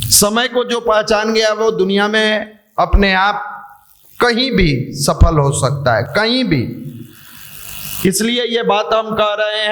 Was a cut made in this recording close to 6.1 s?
no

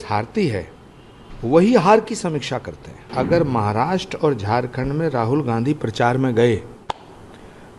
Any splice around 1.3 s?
no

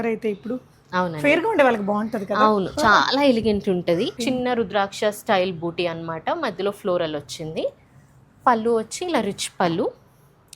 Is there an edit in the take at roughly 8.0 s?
no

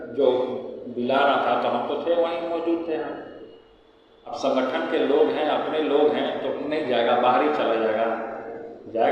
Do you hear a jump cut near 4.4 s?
no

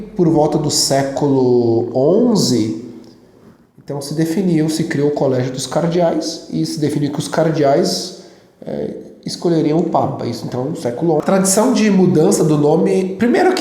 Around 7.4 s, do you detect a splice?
no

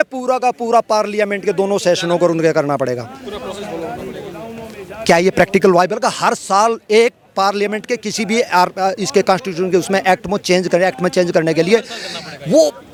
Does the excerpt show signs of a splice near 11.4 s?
no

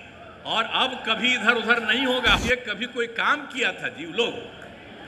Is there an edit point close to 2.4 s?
yes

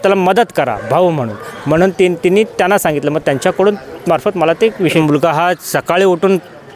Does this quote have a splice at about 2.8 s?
no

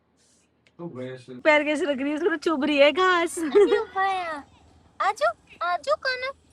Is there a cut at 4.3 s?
no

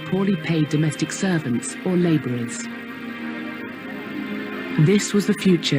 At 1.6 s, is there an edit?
no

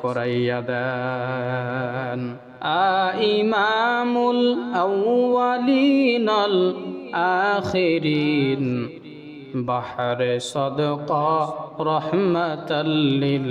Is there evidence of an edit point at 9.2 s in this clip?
no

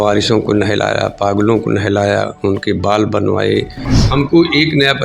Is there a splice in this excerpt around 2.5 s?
no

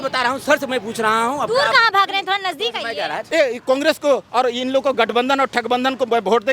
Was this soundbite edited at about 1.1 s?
no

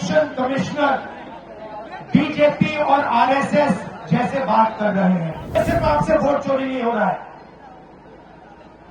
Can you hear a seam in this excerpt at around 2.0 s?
no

